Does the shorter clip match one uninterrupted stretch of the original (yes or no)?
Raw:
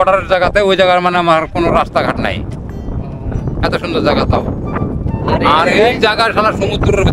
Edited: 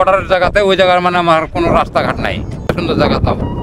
no